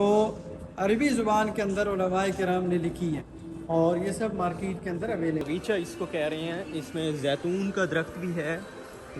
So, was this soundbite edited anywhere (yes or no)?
yes